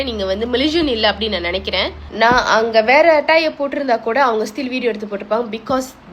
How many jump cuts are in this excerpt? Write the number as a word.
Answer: one